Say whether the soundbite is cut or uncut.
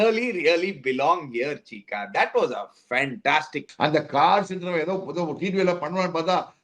cut